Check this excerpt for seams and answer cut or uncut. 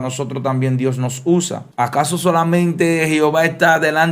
cut